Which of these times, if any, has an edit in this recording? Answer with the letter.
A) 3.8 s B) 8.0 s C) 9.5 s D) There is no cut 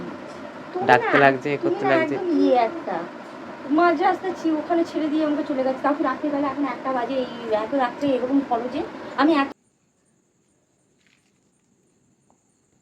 C